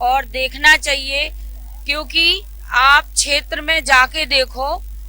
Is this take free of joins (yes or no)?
yes